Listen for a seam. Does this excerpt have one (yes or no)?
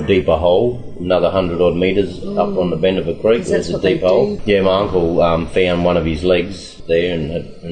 yes